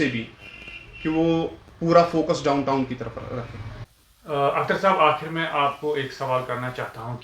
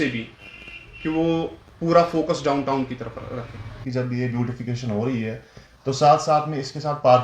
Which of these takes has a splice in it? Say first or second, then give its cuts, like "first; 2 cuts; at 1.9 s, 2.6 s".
second; 1 cut; at 3.8 s